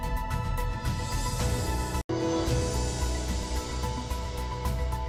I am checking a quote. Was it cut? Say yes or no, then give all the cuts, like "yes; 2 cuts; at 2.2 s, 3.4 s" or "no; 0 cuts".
no; 0 cuts